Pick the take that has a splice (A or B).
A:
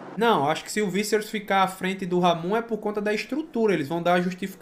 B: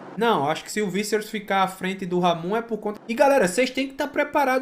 B